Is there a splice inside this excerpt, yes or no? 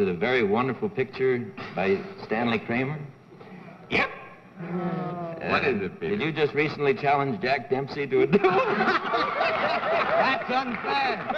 yes